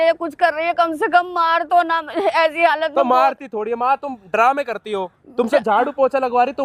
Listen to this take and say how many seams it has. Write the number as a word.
zero